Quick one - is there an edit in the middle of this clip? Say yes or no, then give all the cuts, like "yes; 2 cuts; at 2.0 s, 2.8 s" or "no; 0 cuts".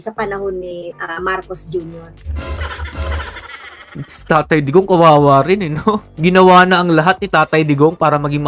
no; 0 cuts